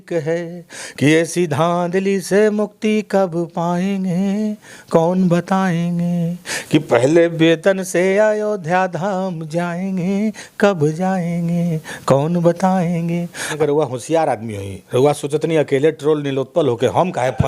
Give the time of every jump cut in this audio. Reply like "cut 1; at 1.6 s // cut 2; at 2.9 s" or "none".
cut 1; at 13.5 s